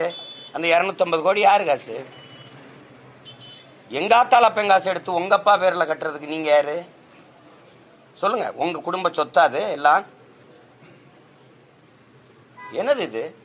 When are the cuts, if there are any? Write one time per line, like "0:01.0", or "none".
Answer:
0:12.5